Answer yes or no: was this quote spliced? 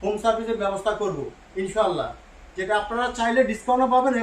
no